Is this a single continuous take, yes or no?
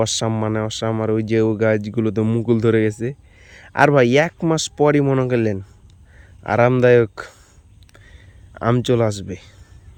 yes